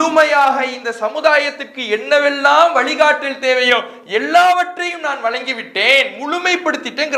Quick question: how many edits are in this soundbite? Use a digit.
0